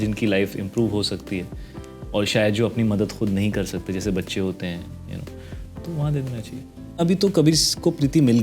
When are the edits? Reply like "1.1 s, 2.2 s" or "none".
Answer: 7.0 s